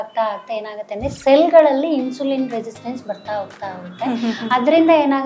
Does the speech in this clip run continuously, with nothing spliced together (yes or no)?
yes